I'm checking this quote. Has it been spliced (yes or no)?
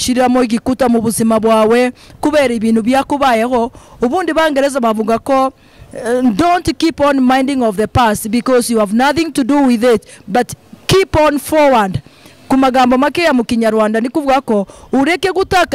no